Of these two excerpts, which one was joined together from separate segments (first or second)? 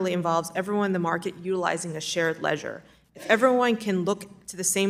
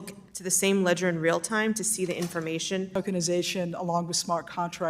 second